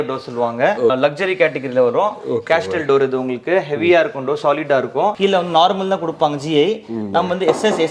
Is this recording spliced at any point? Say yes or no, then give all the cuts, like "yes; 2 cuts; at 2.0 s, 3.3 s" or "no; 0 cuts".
yes; 2 cuts; at 0.9 s, 5.1 s